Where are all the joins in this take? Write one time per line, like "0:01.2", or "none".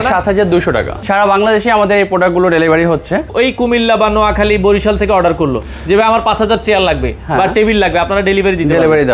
0:01.0
0:03.3